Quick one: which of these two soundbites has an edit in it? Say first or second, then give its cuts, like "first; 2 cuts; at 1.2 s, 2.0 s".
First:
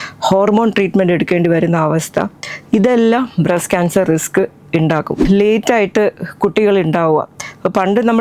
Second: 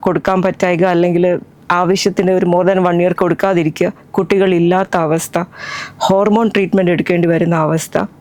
first; 1 cut; at 5.2 s